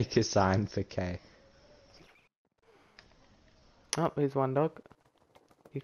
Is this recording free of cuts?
yes; 0 cuts

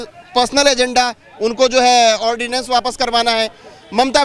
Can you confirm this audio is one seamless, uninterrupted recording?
yes; 0 cuts

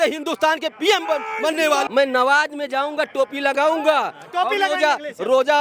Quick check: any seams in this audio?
yes; 1 cut; at 1.9 s

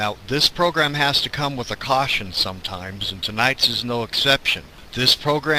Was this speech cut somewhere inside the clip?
no; 0 cuts

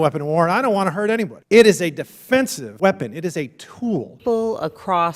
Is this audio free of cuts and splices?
no; 1 cut; at 4.1 s

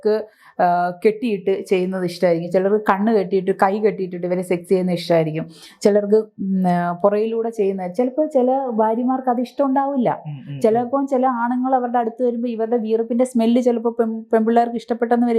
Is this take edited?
no; 0 cuts

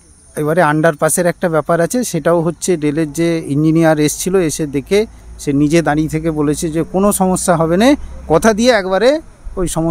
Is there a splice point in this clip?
no; 0 cuts

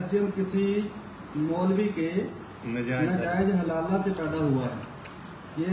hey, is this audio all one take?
yes; 0 cuts

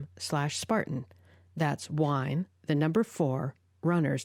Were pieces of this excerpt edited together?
no; 0 cuts

